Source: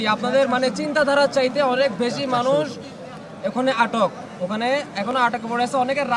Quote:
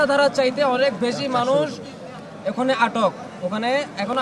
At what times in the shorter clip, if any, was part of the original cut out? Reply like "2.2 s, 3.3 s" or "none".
none

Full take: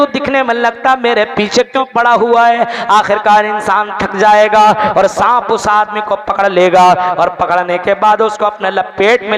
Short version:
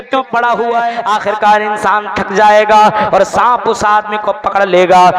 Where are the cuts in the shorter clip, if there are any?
1.0 s

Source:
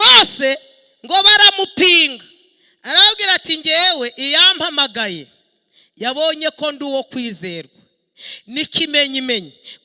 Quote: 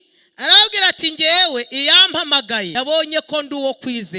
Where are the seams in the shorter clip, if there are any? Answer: 2.7 s

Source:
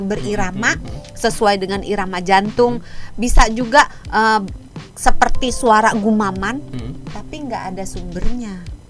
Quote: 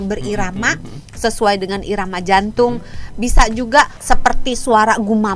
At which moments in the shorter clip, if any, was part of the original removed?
4.0 s

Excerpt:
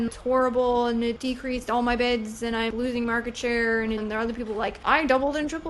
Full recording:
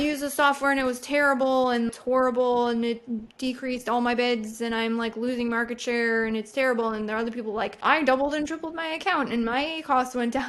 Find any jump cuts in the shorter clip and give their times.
1.2 s, 2.7 s, 4.0 s

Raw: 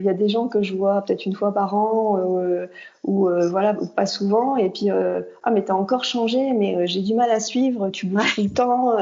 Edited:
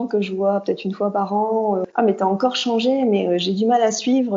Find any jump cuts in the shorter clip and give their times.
1.8 s

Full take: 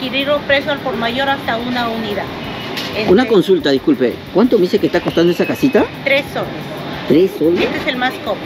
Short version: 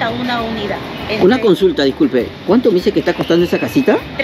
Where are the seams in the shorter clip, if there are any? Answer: 1.0 s

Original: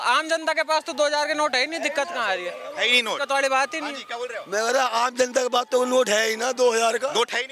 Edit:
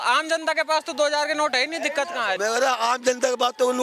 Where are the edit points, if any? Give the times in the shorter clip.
2.4 s

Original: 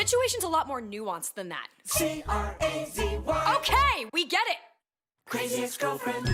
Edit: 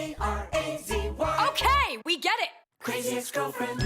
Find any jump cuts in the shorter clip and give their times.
2.7 s

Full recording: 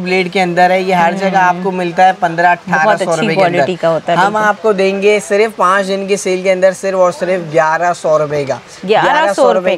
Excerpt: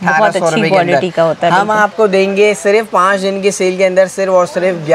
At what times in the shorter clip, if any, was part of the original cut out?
none

